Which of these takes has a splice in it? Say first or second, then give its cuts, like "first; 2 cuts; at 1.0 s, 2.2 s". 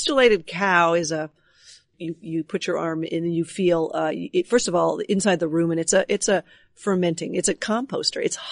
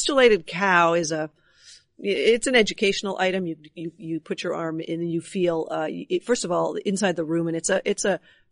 first; 2 cuts; at 1.9 s, 7.6 s